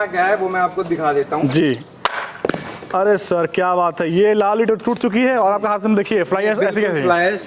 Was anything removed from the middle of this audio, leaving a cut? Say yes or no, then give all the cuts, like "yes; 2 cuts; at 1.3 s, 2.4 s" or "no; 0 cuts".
no; 0 cuts